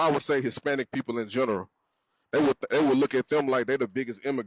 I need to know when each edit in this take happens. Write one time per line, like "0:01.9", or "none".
none